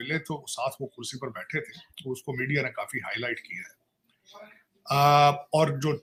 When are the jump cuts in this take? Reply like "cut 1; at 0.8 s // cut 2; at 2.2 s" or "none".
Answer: none